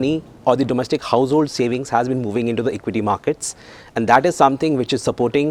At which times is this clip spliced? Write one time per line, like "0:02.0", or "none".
none